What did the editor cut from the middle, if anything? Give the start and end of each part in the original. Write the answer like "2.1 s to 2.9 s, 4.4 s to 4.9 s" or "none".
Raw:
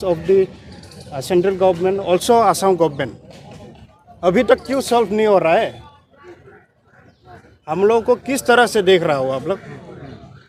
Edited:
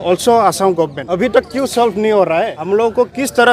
3.0 s to 4.1 s, 5.7 s to 7.7 s